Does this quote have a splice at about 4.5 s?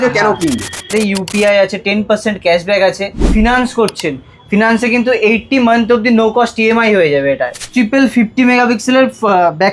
no; 3 cuts; at 0.9 s, 3.3 s, 7.6 s

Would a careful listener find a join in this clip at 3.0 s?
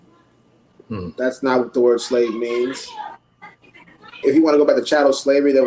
no; 1 cut; at 4.2 s

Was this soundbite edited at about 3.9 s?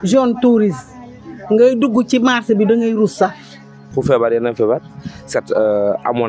yes; 1 cut; at 3.9 s

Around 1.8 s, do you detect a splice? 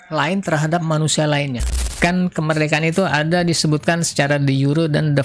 yes; 1 cut; at 1.8 s

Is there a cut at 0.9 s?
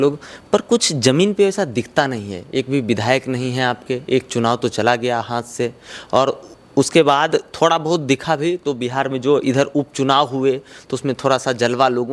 no; 0 cuts

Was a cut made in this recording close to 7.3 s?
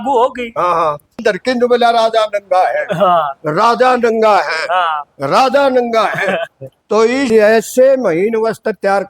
yes; 2 cuts; at 1.2 s, 7.3 s

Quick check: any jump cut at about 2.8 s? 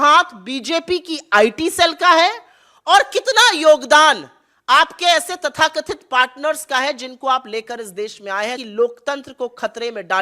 no; 1 cut; at 8.6 s

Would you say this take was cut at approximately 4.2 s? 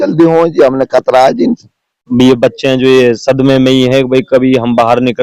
no; 1 cut; at 2.0 s

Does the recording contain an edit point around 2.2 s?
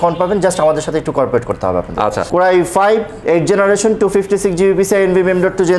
yes; 1 cut; at 2.2 s

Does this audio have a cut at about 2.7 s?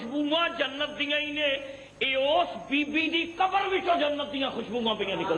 no; 0 cuts

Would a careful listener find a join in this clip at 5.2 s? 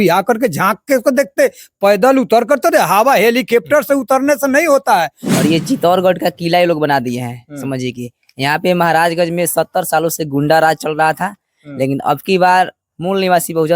yes; 1 cut; at 5.2 s

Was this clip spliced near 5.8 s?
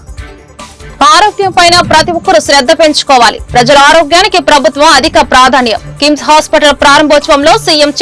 no; 1 cut; at 0.9 s

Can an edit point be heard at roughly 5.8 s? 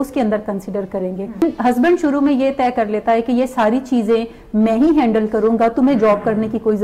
no; 1 cut; at 1.4 s

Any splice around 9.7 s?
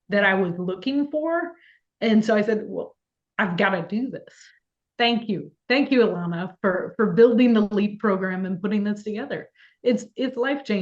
no; 1 cut; at 4.8 s

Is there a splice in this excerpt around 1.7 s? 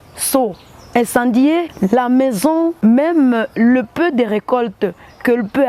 yes; 2 cuts; at 1.7 s, 2.8 s

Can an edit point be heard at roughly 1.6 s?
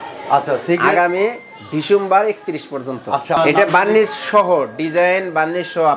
no; 1 cut; at 3.4 s

